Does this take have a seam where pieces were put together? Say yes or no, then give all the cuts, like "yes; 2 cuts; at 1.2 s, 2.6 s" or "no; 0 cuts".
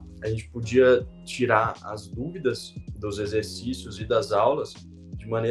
no; 0 cuts